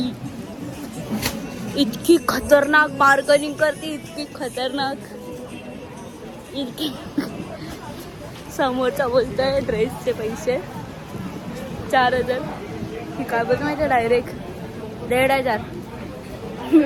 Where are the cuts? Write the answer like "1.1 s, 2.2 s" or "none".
none